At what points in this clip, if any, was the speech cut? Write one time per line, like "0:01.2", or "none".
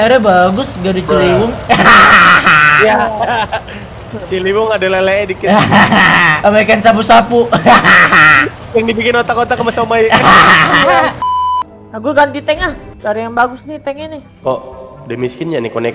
0:06.3
0:11.2